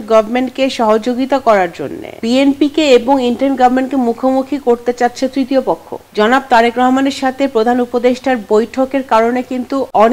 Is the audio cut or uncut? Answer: cut